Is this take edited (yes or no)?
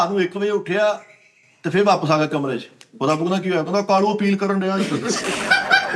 no